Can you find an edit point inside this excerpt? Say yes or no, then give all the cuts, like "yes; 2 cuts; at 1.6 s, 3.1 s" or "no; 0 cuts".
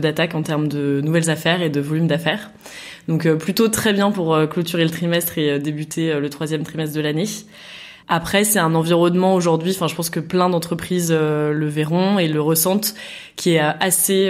no; 0 cuts